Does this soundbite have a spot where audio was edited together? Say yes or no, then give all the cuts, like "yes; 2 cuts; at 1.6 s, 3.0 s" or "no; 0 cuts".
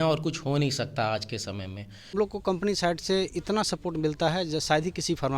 yes; 1 cut; at 2.1 s